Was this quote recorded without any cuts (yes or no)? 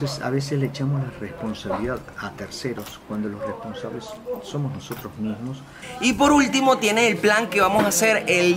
no